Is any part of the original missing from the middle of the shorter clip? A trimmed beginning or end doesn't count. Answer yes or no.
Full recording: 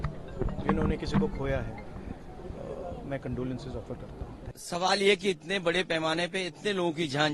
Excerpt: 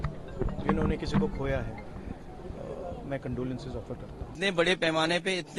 yes